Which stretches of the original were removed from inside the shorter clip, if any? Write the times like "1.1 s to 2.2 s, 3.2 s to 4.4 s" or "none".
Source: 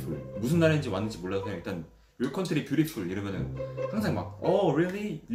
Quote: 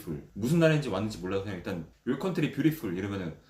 1.9 s to 2.0 s